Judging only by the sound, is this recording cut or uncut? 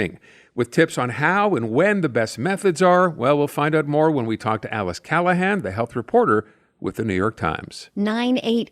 cut